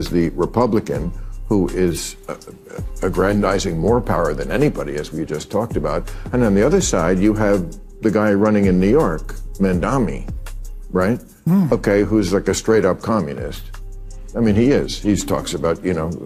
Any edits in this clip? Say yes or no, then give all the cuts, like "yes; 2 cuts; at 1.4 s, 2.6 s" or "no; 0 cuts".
no; 0 cuts